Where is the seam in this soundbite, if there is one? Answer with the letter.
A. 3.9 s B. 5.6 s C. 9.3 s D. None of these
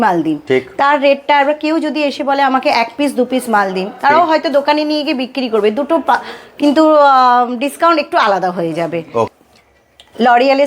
C